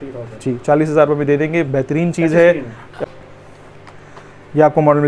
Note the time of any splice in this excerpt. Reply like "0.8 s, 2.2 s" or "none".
2.8 s